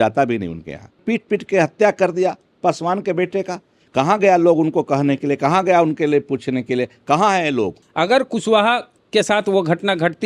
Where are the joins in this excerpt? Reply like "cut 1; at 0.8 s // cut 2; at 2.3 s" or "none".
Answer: cut 1; at 1.0 s // cut 2; at 7.8 s // cut 3; at 8.9 s